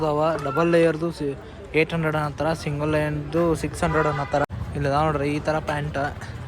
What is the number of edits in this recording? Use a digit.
1